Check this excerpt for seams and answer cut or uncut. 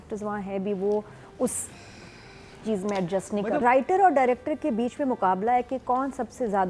cut